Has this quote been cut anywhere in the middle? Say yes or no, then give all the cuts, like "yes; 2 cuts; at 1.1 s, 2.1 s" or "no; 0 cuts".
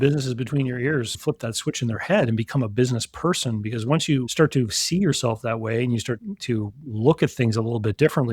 yes; 1 cut; at 1.1 s